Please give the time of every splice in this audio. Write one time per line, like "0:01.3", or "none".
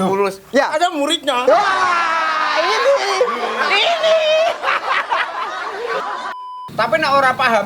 0:06.3